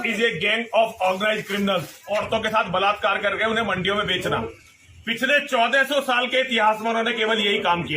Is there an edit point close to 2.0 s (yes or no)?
yes